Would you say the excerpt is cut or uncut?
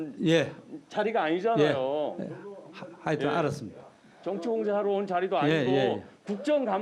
uncut